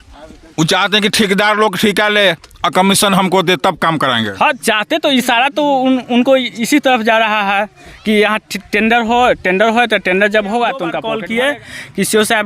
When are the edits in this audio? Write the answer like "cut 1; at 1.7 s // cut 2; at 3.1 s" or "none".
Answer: cut 1; at 11.0 s

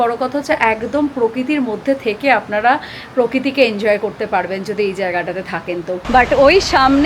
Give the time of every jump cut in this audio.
cut 1; at 5.9 s

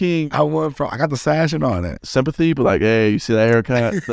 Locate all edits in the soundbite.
cut 1; at 2.0 s

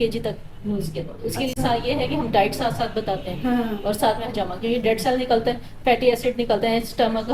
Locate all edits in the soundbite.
none

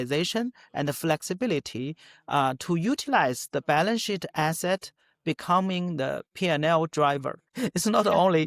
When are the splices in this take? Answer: cut 1; at 7.4 s

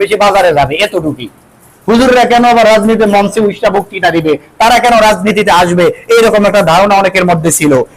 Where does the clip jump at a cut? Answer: none

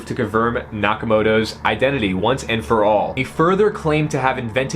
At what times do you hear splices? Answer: cut 1; at 3.1 s

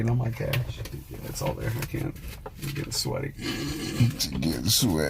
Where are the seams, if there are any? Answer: cut 1; at 1.3 s

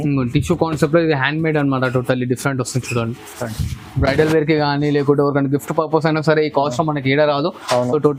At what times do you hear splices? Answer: none

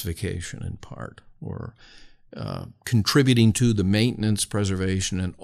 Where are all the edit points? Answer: none

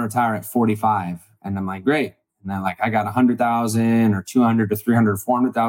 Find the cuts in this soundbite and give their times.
none

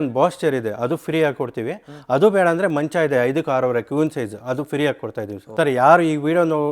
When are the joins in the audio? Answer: cut 1; at 5.5 s

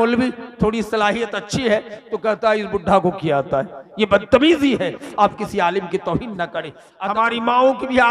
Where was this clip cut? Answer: cut 1; at 6.8 s

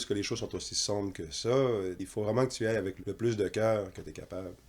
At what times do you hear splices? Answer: cut 1; at 2.0 s // cut 2; at 3.0 s

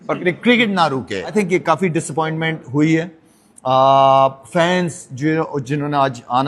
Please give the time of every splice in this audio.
cut 1; at 1.3 s

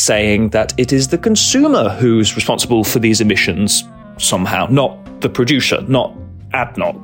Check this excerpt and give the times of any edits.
none

